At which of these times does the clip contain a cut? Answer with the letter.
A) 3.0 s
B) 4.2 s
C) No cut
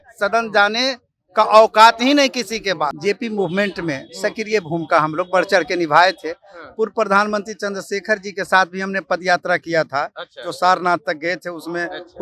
A